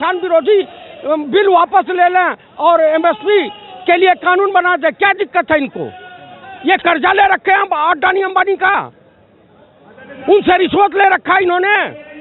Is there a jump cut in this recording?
no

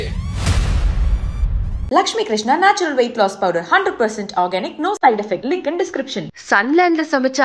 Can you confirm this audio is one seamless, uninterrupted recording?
yes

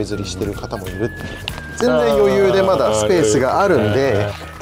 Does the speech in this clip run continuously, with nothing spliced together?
no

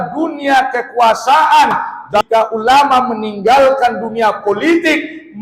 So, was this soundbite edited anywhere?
yes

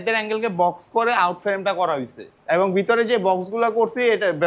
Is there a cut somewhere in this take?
yes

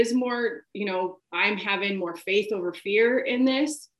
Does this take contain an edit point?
yes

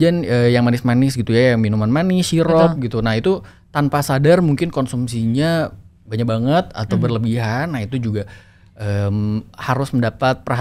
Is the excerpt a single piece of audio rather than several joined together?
yes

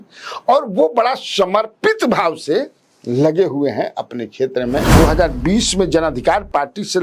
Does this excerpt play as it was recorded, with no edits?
no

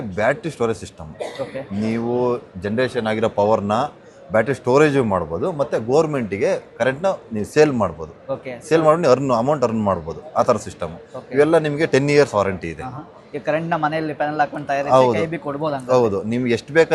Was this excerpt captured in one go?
yes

